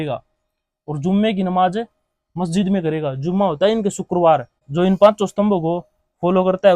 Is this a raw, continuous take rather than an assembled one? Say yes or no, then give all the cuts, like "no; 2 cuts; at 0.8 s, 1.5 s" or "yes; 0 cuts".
no; 1 cut; at 4.6 s